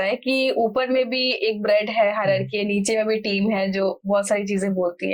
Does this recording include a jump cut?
no; 0 cuts

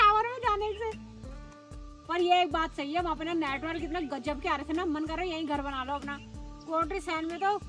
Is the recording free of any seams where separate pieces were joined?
yes; 0 cuts

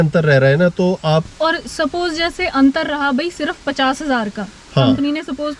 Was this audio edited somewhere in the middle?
yes; 1 cut; at 1.3 s

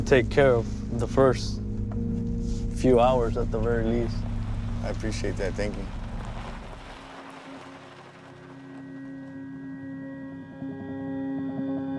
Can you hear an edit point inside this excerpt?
no; 0 cuts

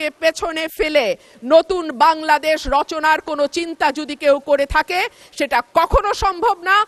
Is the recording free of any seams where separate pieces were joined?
yes; 0 cuts

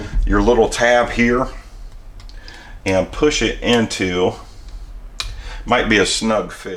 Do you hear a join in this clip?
no; 0 cuts

